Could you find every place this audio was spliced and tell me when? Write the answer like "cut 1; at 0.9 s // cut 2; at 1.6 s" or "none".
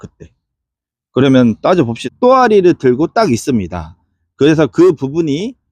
cut 1; at 2.0 s